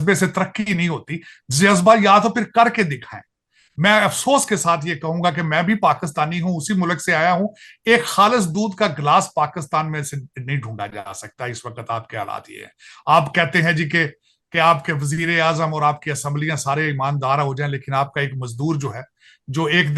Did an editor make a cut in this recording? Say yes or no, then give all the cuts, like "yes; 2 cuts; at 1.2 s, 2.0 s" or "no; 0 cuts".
no; 0 cuts